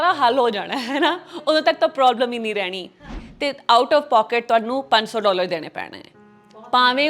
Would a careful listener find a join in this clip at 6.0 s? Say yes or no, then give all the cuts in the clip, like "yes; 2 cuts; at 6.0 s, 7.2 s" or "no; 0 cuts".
no; 1 cut; at 3.2 s